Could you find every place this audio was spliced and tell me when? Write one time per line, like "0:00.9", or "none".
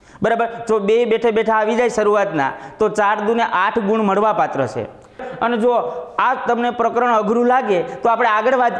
0:05.3